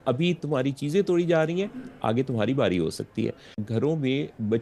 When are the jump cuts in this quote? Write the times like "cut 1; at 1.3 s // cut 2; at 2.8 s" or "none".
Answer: cut 1; at 3.6 s